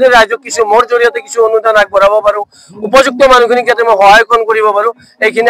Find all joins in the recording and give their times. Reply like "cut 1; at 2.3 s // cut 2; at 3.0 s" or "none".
none